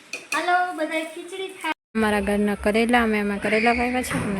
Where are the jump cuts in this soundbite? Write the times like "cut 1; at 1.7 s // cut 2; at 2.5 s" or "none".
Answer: cut 1; at 1.7 s